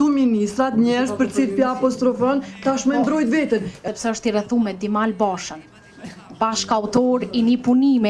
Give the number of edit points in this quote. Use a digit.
1